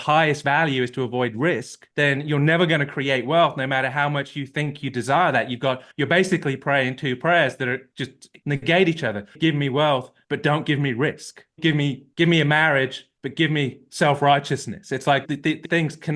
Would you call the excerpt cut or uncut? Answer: uncut